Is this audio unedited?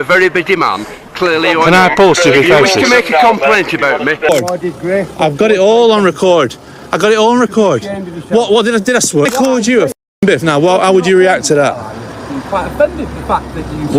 no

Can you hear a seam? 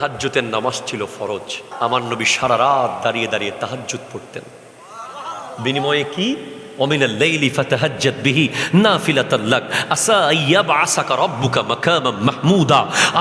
yes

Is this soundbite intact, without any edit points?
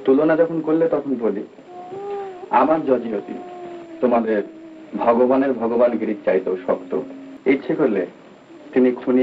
no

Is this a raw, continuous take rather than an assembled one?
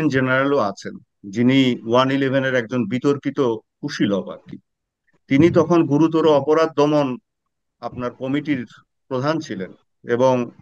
yes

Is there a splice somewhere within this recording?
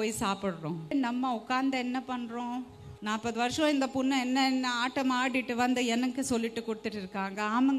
yes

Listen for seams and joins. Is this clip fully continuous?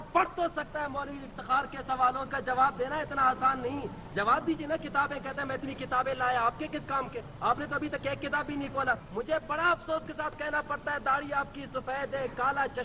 no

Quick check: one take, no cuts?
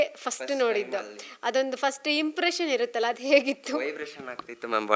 yes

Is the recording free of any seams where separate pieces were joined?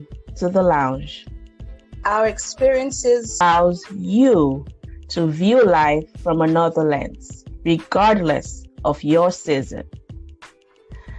no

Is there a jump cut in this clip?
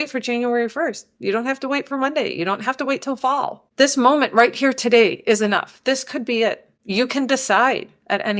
no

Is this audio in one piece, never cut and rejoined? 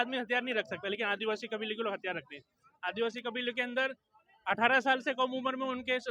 yes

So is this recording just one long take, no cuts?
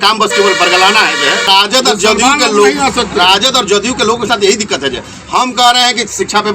no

